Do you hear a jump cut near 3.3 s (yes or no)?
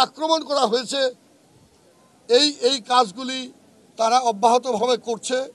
no